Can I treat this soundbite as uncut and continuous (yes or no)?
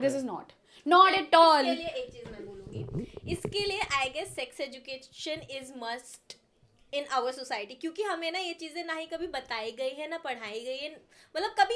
yes